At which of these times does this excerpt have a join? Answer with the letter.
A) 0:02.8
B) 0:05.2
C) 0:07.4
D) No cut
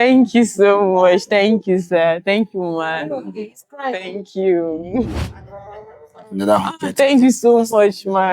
B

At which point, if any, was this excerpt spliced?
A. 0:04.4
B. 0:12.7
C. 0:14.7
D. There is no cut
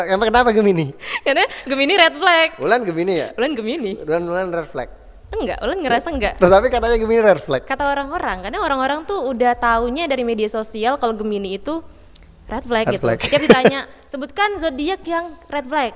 D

